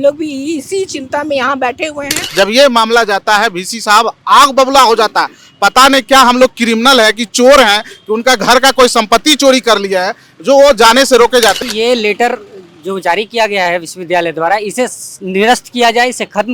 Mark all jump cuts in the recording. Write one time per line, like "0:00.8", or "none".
0:02.2
0:11.6